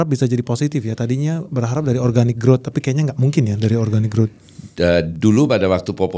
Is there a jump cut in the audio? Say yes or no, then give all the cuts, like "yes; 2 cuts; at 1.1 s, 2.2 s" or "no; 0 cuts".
no; 0 cuts